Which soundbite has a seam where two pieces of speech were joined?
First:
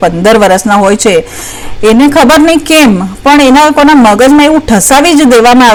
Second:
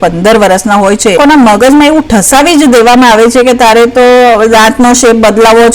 second; 1 cut; at 1.2 s

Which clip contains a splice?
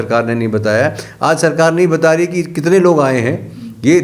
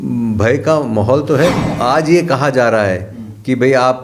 second; 1 cut; at 1.7 s

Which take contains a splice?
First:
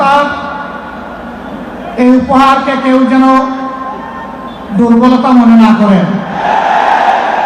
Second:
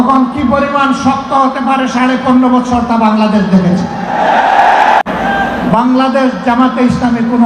second; 1 cut; at 5.0 s

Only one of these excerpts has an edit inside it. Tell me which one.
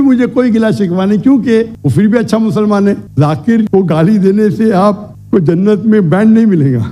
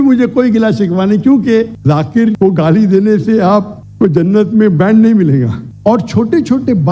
second; 2 cuts; at 1.7 s, 5.6 s

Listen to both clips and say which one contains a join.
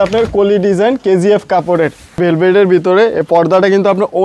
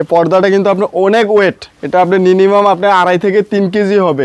first; 1 cut; at 2.2 s

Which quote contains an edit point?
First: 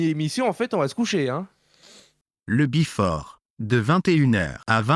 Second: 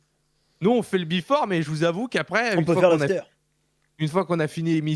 first; 1 cut; at 2.3 s

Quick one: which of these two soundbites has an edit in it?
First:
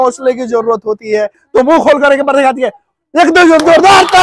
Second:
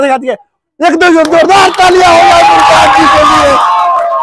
first; 1 cut; at 1.4 s

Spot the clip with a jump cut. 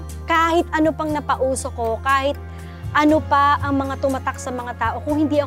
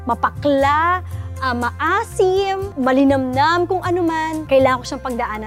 second; 2 cuts; at 2.7 s, 4.4 s

